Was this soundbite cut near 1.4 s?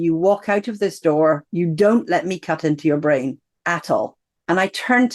no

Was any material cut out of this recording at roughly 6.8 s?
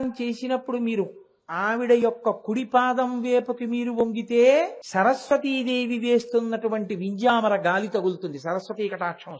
no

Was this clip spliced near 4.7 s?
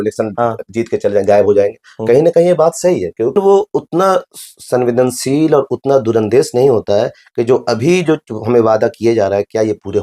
no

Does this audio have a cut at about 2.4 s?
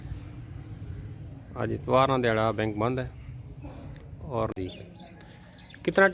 no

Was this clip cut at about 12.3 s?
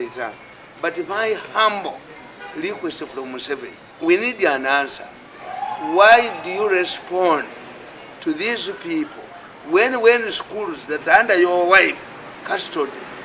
yes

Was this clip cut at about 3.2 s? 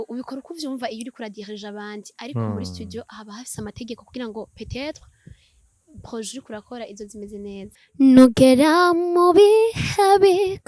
no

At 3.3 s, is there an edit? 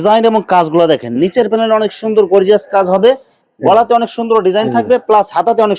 no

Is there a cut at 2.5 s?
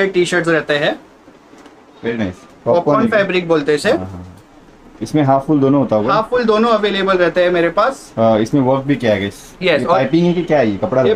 yes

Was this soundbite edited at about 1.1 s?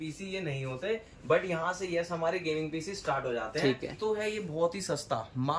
no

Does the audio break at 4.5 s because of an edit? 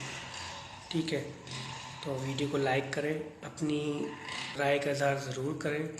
yes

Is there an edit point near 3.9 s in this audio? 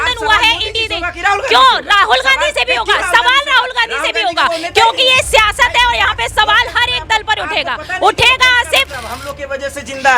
no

